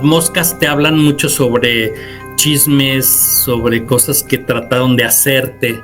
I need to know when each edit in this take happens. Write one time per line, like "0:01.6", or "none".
none